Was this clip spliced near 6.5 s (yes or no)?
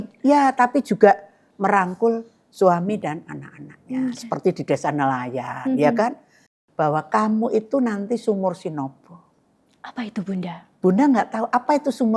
yes